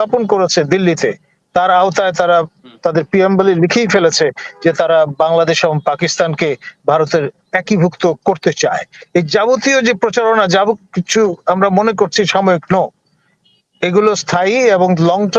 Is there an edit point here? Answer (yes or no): no